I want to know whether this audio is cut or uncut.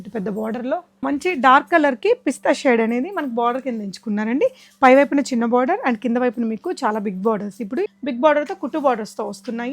cut